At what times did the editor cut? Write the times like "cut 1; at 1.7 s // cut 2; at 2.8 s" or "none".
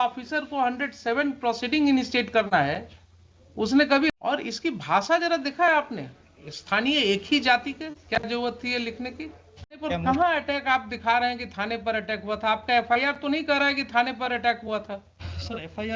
cut 1; at 4.1 s // cut 2; at 9.8 s